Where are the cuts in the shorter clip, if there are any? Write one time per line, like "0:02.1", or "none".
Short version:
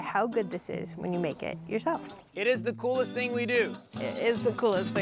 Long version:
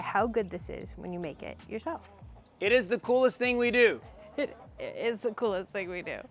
0:02.2
0:03.9

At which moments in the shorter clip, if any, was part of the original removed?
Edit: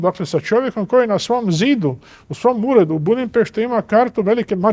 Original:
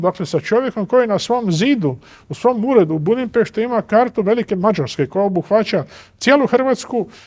none

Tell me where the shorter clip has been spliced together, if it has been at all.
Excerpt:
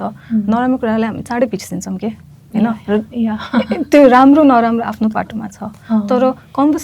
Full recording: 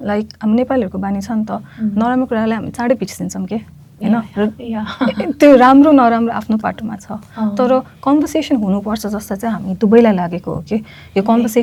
none

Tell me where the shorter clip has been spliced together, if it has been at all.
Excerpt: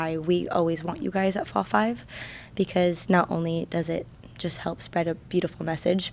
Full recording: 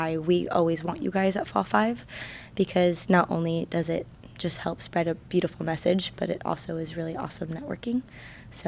none

